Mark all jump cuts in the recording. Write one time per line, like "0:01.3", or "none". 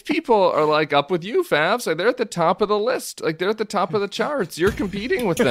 none